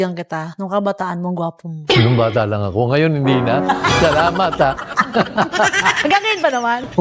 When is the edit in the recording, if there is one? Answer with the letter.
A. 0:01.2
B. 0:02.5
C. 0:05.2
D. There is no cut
D